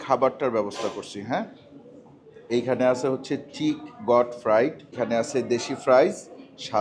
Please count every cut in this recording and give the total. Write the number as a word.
one